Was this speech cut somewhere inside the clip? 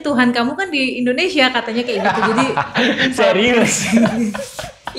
no; 0 cuts

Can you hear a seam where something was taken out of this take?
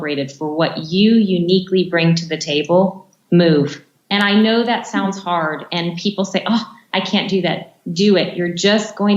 no; 0 cuts

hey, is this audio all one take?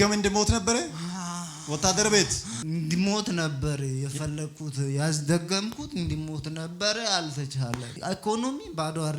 no; 2 cuts; at 2.5 s, 7.9 s

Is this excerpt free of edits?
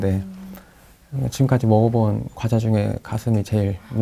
yes; 0 cuts

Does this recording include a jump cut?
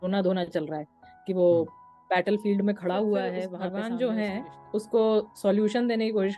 yes; 1 cut; at 3.6 s

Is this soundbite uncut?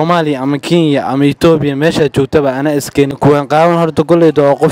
no; 1 cut; at 3.1 s

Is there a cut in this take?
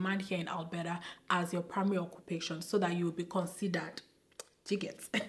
no; 0 cuts

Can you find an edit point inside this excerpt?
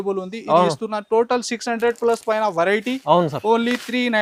no; 0 cuts

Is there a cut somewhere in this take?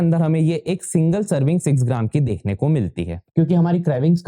yes; 1 cut; at 3.2 s

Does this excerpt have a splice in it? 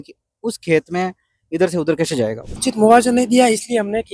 yes; 1 cut; at 2.5 s

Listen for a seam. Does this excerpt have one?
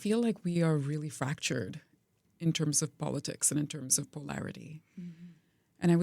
yes; 1 cut; at 2.1 s

